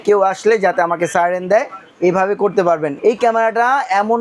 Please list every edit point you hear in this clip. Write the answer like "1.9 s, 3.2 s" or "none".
2.9 s